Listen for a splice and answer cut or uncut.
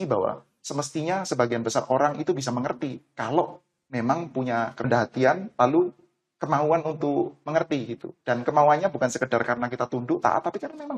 cut